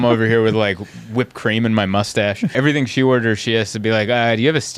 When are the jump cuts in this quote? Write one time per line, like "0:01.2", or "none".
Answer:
0:02.5